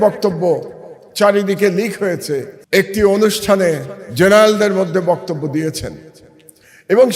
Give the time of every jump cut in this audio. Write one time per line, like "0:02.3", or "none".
0:02.5